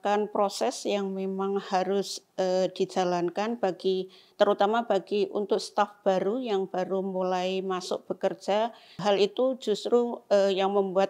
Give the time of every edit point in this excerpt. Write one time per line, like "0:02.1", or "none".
0:09.0